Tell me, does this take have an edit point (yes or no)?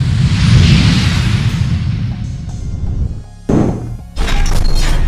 yes